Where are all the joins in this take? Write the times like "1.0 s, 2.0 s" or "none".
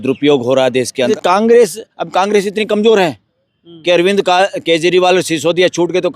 1.1 s